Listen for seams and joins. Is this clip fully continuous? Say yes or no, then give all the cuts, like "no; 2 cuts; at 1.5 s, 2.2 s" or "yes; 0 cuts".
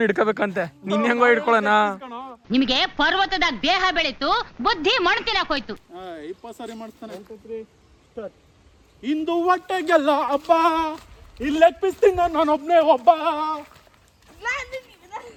yes; 0 cuts